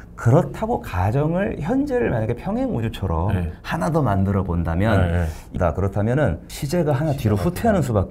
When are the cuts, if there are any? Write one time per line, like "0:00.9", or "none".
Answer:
0:05.5
0:06.5